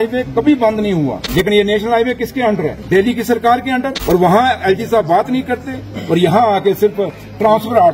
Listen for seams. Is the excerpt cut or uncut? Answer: cut